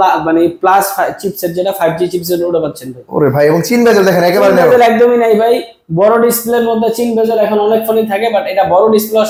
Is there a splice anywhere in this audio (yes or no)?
no